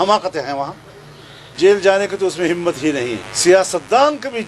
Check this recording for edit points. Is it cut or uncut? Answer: cut